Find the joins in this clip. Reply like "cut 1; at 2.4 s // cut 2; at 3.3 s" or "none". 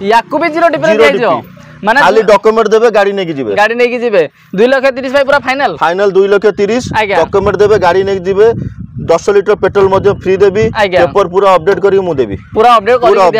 none